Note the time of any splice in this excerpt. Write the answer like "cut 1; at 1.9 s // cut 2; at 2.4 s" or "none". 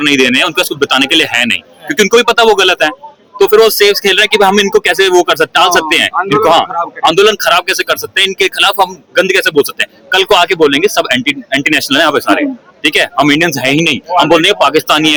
none